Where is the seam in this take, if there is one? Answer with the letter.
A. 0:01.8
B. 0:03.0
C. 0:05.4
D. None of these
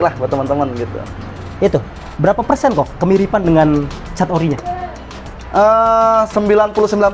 D